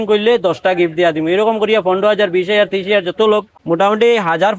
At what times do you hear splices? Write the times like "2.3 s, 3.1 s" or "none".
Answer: 3.5 s